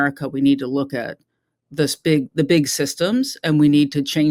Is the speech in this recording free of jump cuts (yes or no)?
yes